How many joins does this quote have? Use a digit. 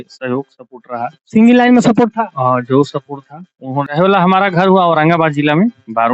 1